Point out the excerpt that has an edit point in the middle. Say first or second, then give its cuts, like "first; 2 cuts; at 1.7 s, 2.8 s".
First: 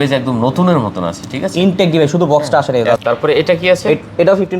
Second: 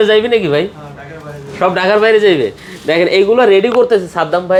first; 1 cut; at 3.0 s